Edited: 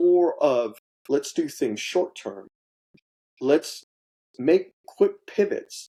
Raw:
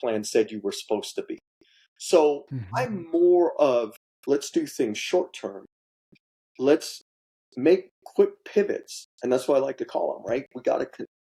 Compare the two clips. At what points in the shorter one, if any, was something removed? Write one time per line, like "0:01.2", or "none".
none